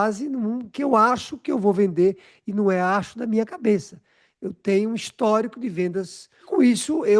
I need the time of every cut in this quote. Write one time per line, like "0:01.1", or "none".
none